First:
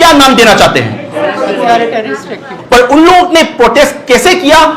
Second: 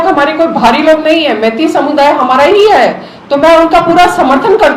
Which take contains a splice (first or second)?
first